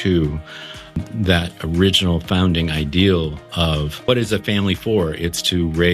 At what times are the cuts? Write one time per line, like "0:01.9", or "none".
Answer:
0:01.0
0:04.1